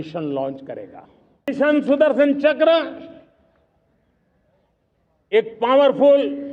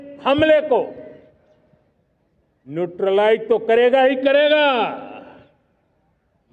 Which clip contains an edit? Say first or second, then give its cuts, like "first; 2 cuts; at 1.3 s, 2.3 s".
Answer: first; 1 cut; at 1.5 s